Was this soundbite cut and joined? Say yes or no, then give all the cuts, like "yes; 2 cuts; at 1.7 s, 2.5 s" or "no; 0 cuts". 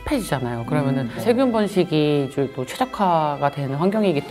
no; 0 cuts